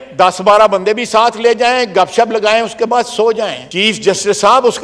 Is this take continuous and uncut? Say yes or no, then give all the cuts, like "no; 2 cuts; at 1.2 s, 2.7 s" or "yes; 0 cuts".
no; 1 cut; at 3.6 s